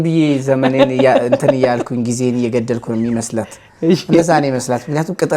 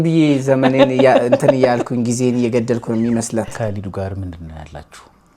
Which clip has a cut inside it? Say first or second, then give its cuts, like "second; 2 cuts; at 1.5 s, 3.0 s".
second; 1 cut; at 3.5 s